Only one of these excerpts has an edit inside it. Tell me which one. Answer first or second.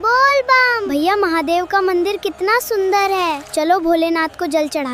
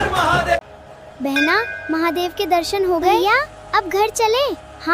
second